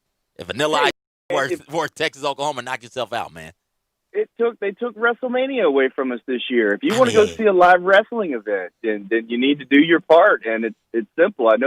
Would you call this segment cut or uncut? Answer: uncut